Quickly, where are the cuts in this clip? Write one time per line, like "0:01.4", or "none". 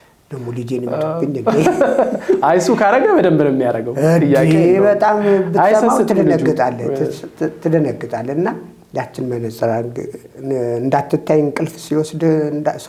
none